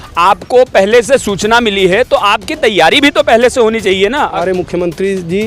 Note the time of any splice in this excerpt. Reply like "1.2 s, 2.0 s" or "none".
4.4 s